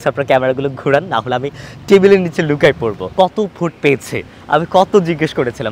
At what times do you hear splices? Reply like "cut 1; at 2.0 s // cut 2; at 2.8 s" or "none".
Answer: cut 1; at 3.0 s